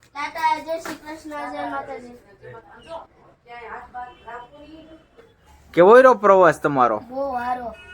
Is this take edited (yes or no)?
yes